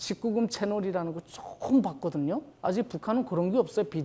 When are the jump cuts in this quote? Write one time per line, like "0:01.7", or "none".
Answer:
none